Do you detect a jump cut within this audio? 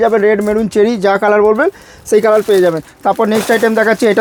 no; 0 cuts

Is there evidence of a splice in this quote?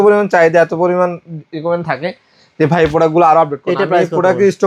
no; 0 cuts

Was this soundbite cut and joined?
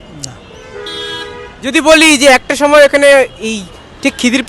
no; 0 cuts

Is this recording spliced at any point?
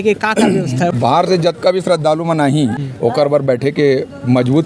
yes; 2 cuts; at 0.9 s, 2.8 s

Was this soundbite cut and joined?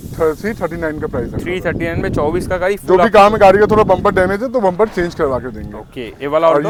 no; 0 cuts

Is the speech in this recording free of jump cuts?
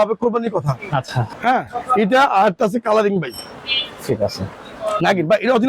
no; 1 cut; at 1.2 s

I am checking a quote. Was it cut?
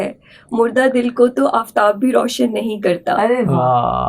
no; 0 cuts

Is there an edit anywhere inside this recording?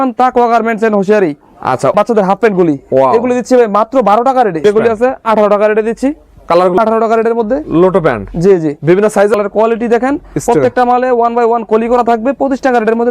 yes; 4 cuts; at 1.9 s, 4.6 s, 6.8 s, 9.4 s

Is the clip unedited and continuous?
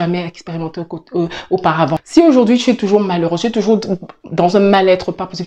no; 1 cut; at 2.1 s

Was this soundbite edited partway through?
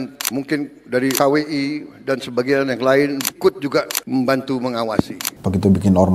yes; 1 cut; at 5.2 s

